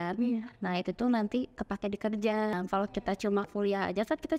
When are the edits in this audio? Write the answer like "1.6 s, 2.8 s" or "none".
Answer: 2.5 s